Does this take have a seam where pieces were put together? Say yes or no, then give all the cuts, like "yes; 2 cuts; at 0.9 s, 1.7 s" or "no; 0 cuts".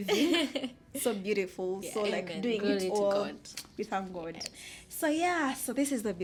no; 0 cuts